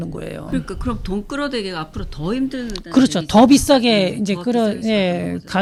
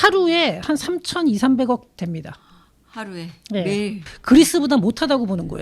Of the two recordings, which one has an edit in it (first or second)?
second